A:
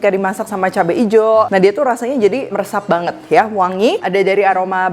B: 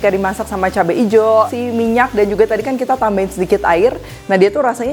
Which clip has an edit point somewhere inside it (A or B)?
A